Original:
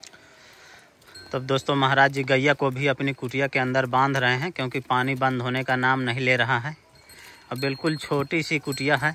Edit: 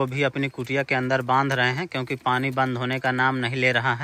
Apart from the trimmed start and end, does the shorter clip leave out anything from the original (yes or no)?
no